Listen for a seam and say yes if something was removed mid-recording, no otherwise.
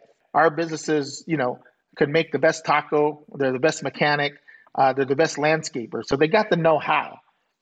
no